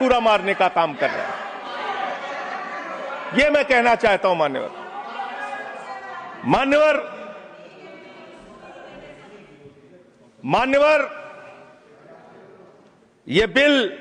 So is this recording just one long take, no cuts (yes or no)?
yes